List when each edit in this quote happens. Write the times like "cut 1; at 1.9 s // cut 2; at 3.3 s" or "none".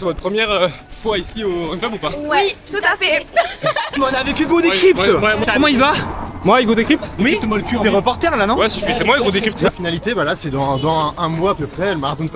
cut 1; at 4.0 s // cut 2; at 5.4 s // cut 3; at 9.7 s